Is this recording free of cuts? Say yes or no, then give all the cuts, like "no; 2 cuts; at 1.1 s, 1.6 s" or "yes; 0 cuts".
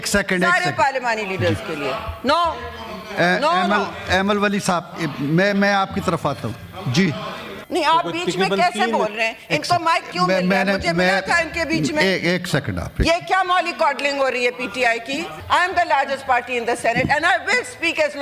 no; 2 cuts; at 7.6 s, 15.4 s